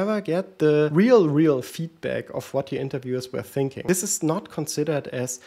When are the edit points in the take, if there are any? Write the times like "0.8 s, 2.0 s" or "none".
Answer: 0.9 s, 3.8 s